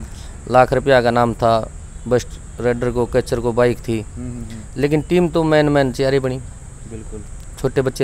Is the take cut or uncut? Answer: uncut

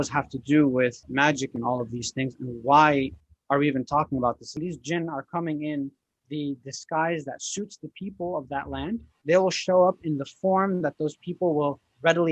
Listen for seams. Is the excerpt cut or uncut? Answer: cut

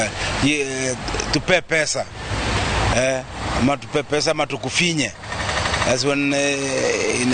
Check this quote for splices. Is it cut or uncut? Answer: uncut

